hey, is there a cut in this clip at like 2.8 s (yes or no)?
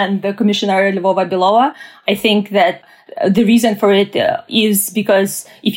yes